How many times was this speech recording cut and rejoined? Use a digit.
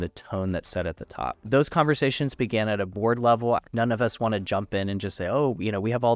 2